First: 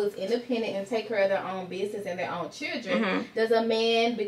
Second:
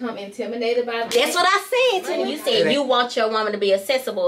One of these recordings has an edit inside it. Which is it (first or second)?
second